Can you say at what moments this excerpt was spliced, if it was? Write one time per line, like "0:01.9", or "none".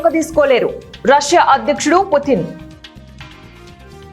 none